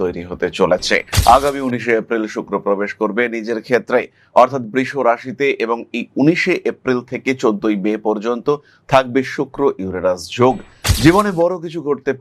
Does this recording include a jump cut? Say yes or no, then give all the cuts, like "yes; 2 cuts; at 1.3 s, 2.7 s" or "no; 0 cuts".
no; 0 cuts